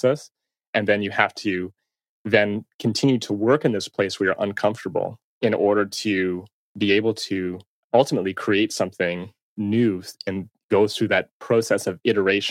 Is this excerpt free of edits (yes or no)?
no